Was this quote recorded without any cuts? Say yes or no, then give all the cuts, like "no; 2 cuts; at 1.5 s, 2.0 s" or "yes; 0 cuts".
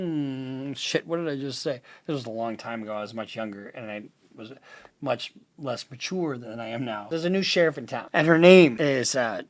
no; 3 cuts; at 7.1 s, 7.9 s, 8.7 s